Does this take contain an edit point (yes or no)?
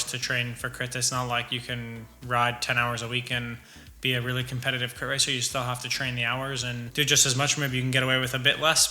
no